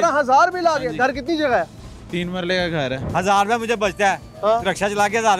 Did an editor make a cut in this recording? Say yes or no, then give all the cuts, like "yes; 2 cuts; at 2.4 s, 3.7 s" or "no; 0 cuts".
yes; 1 cut; at 3.0 s